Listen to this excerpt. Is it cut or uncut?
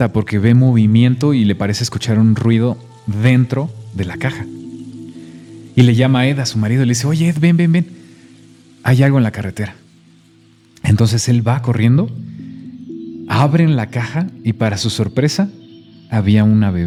uncut